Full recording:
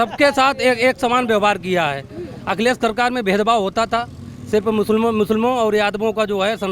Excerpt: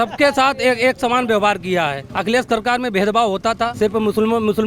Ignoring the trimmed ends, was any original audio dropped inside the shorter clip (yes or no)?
yes